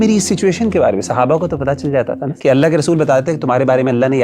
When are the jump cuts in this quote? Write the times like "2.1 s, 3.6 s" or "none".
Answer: 2.3 s